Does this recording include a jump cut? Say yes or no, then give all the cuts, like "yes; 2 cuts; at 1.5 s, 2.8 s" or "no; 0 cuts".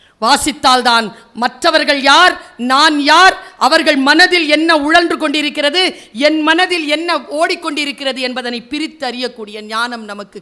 no; 0 cuts